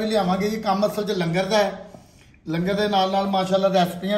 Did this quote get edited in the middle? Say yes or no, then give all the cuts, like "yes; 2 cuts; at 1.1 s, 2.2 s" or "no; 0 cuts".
no; 0 cuts